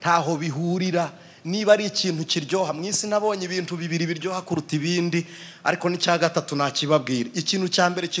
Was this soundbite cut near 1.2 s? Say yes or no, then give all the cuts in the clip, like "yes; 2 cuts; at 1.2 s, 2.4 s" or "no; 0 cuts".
no; 0 cuts